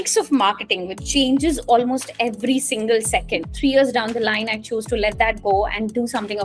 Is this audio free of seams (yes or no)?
no